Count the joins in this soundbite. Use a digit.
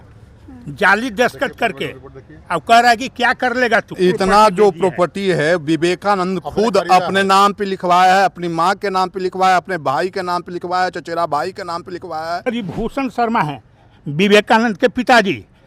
2